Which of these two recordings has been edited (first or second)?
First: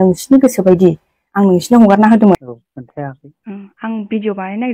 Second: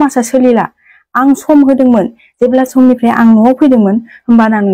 first